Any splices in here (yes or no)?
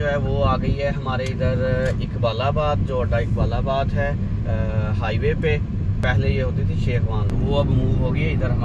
yes